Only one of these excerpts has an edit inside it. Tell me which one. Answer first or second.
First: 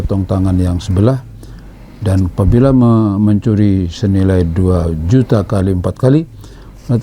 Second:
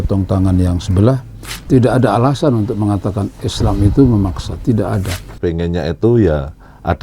second